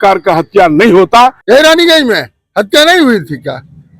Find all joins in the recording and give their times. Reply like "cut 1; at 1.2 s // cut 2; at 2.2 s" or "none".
cut 1; at 1.4 s